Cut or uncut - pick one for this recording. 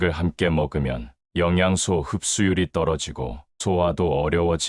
cut